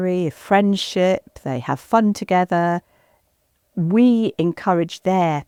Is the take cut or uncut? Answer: uncut